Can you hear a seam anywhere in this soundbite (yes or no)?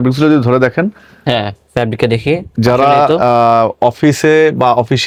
no